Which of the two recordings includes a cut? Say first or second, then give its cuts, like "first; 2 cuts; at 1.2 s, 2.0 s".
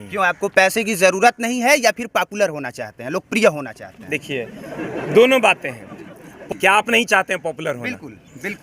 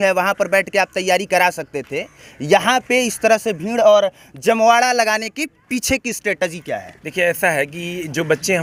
first; 1 cut; at 6.3 s